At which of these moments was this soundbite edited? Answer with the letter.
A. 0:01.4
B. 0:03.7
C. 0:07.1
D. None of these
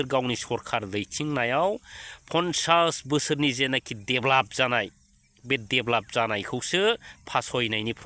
D